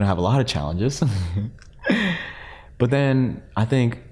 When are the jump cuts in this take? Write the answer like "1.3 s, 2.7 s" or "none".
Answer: none